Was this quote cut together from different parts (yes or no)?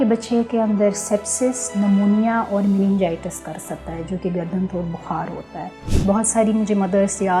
yes